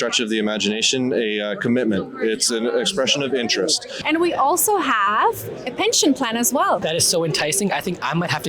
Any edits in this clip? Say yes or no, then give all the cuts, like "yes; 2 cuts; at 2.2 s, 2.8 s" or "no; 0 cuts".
yes; 2 cuts; at 3.9 s, 6.8 s